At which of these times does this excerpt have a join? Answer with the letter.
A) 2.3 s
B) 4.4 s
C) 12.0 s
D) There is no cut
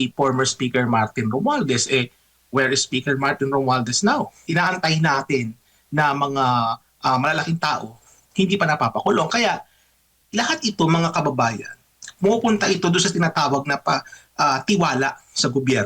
B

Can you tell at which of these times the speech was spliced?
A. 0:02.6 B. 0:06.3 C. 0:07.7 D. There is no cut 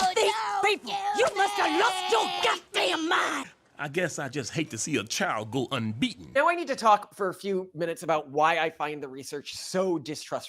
B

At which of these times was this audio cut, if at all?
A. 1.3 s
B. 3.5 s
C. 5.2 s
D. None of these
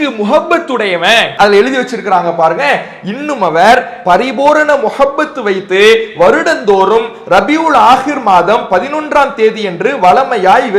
A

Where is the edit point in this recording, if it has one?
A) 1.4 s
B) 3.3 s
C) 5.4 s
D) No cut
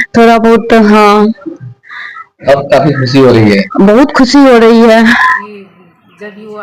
C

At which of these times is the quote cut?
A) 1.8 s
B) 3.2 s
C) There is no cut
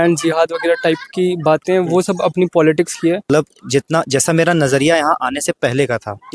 B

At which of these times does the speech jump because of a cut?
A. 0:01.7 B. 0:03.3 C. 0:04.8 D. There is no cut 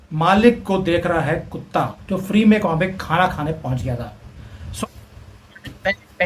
C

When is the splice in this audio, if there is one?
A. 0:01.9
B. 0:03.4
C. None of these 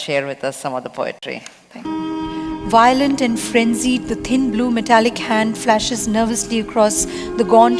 A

